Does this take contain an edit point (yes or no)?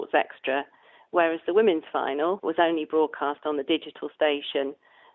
yes